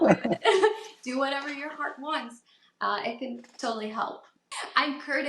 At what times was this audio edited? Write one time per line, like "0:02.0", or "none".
0:04.4